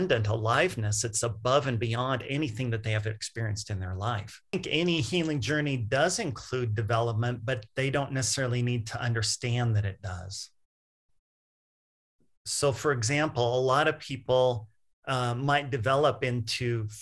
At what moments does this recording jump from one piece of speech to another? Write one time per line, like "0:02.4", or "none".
0:04.5